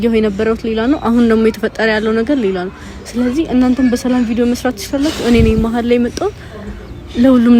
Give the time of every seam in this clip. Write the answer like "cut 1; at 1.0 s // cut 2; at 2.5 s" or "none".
none